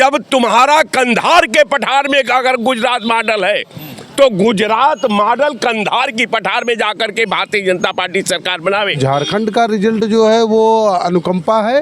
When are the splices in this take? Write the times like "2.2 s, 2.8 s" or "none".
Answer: 9.0 s